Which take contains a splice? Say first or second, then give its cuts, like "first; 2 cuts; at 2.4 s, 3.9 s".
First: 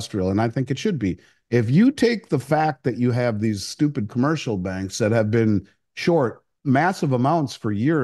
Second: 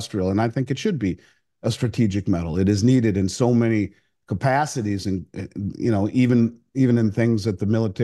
first; 2 cuts; at 1.3 s, 6.5 s